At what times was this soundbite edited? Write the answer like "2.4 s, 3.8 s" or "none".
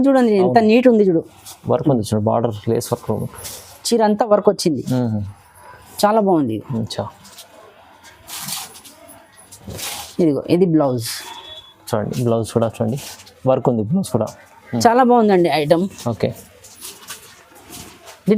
none